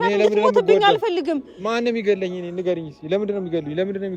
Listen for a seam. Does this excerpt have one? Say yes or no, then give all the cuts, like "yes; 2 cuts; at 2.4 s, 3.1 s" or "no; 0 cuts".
no; 0 cuts